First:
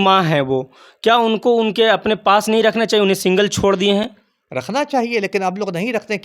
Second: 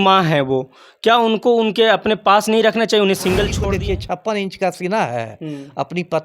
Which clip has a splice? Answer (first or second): second